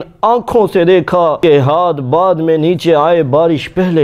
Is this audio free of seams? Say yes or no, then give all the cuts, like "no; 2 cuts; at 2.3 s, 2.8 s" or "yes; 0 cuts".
no; 1 cut; at 1.4 s